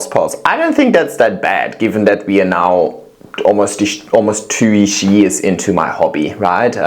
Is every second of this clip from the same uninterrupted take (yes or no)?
yes